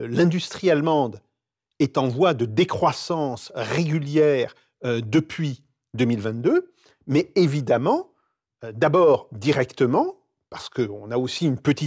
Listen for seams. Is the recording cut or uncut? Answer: uncut